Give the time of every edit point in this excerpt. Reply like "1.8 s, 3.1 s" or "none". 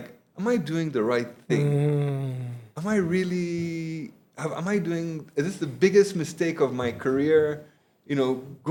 none